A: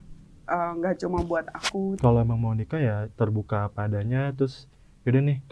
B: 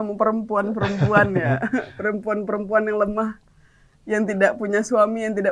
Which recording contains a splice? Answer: A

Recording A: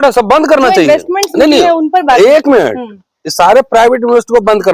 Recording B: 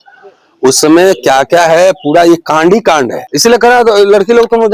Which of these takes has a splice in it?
B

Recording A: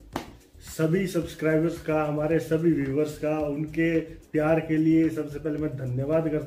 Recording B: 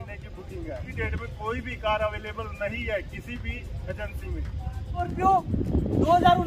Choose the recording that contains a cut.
B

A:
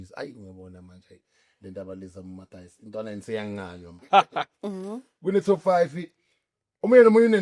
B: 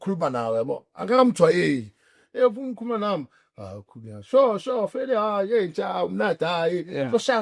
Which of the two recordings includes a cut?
A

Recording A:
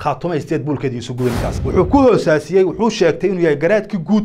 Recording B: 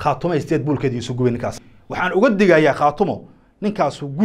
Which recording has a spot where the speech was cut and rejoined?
A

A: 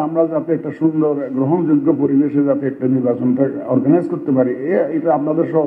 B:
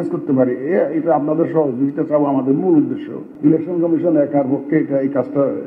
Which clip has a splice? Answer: B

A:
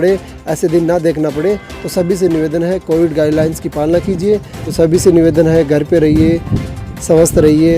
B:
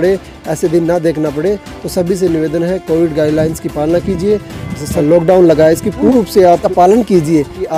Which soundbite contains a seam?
A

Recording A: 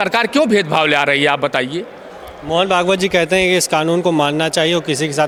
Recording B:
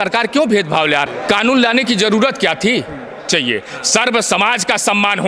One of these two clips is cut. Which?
B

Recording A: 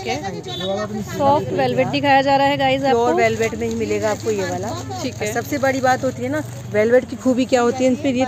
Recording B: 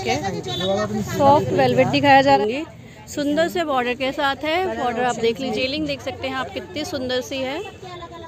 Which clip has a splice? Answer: B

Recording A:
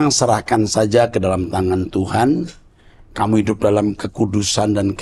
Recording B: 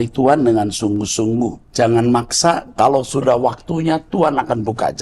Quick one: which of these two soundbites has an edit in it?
B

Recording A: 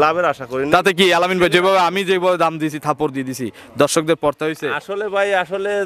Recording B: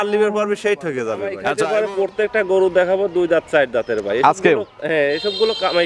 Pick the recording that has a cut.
B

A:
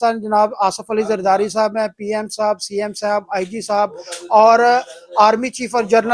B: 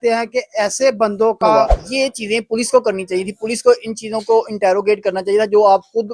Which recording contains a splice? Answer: B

